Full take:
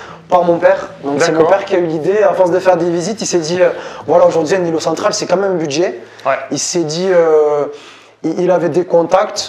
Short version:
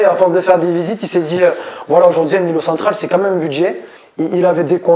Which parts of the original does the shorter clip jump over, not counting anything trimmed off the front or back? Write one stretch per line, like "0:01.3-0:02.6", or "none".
0:06.1-0:07.9